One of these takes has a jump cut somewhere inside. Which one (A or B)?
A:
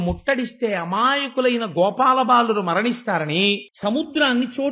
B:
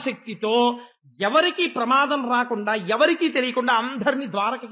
A